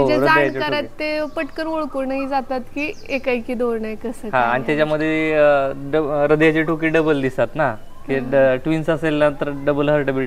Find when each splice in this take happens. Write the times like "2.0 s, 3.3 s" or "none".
none